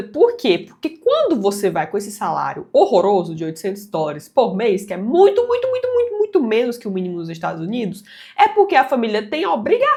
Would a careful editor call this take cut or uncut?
uncut